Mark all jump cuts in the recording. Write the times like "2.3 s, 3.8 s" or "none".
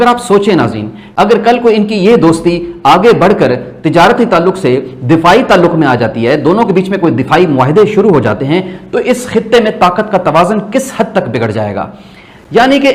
none